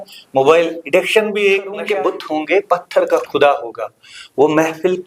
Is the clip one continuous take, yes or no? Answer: no